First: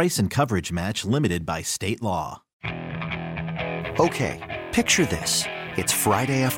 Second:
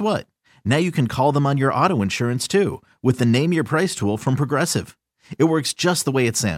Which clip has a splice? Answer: first; 1 cut; at 2.5 s

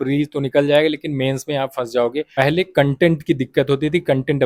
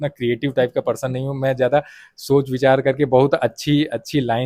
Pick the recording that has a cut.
first; 1 cut; at 2.3 s

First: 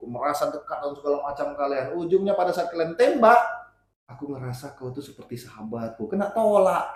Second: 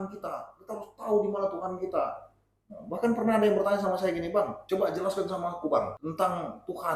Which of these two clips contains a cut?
second; 2 cuts; at 4.6 s, 6.0 s

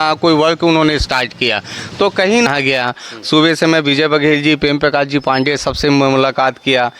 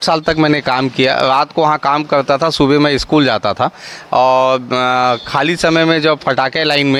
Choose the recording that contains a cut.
first; 1 cut; at 2.5 s

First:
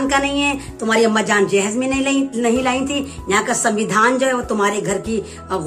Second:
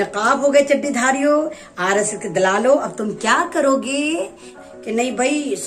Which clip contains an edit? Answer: second; 1 cut; at 4.7 s

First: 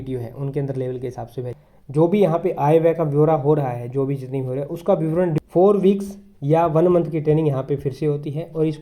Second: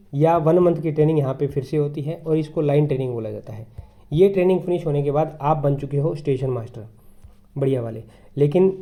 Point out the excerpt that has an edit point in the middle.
first; 2 cuts; at 1.6 s, 5.4 s

